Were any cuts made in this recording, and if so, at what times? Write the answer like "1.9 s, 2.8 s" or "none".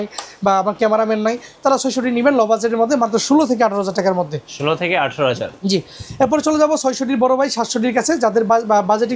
none

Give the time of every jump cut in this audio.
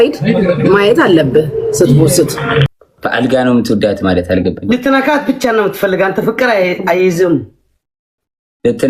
2.8 s

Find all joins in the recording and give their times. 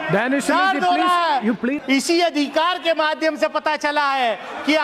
1.8 s

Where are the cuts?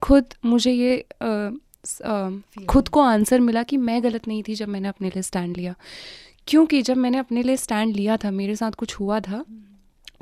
none

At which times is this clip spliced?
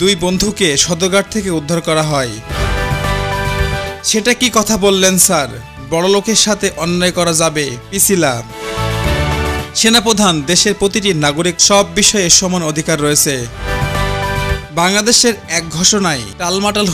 2.5 s, 4.0 s

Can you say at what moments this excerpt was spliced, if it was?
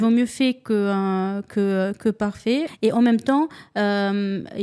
2.7 s

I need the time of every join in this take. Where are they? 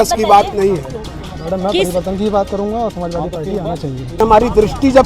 1.0 s, 4.2 s

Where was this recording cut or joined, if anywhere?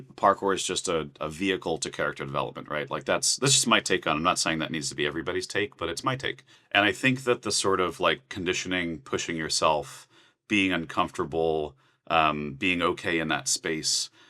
1.2 s, 6.5 s

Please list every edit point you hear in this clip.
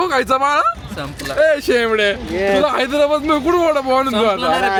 none

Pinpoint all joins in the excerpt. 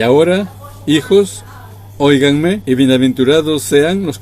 2.6 s

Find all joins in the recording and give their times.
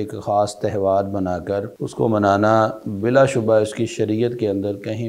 1.8 s

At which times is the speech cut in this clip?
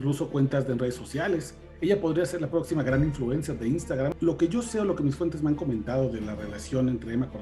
4.1 s

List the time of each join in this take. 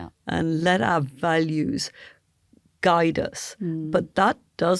none

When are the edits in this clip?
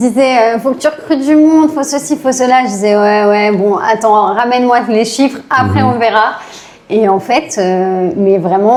none

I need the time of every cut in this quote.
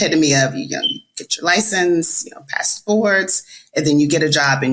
none

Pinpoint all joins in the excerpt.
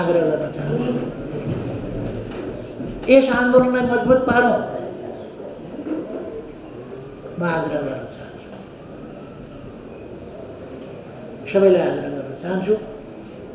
none

